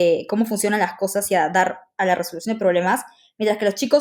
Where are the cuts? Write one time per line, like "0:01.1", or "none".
none